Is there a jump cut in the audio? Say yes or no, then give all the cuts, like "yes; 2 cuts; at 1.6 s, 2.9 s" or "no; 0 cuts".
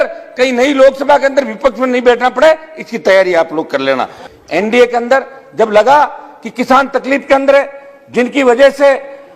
yes; 1 cut; at 4.2 s